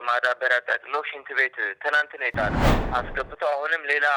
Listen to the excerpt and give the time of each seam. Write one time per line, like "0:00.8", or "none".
0:02.7

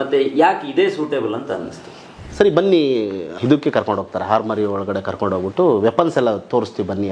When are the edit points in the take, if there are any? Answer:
0:02.2
0:03.3

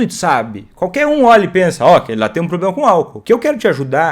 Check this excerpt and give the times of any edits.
0:03.2

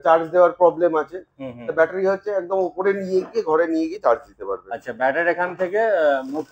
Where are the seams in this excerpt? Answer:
none

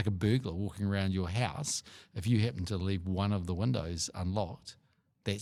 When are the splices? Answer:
none

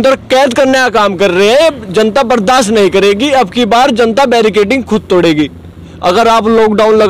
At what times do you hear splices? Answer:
none

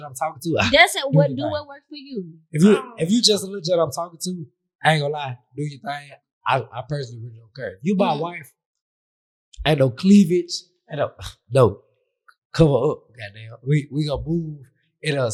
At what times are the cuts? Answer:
none

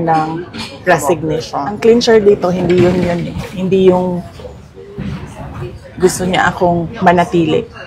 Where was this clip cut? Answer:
0:01.7

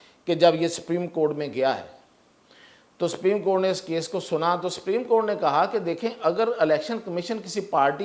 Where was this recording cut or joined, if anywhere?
none

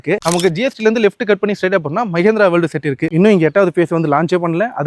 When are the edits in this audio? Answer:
0:03.0

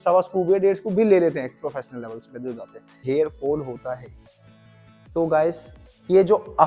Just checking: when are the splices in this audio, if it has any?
0:03.0

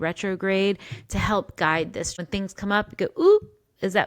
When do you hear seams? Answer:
0:02.2

